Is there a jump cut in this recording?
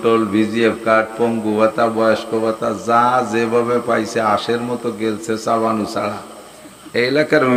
no; 0 cuts

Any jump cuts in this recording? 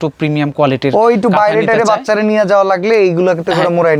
no; 0 cuts

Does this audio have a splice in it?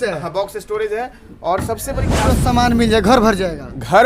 yes; 1 cut; at 2.1 s

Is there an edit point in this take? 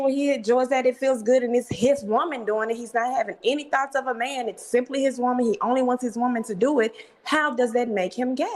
no; 0 cuts

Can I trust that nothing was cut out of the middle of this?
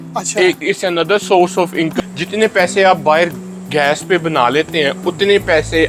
no; 1 cut; at 1.9 s

